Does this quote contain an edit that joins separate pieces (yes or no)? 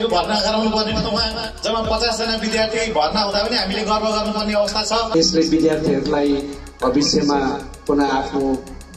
yes